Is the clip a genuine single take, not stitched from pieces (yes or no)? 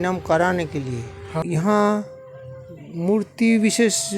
no